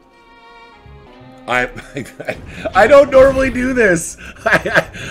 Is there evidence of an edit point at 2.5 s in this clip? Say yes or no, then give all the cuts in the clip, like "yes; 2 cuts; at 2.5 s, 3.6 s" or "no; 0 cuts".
no; 1 cut; at 1.1 s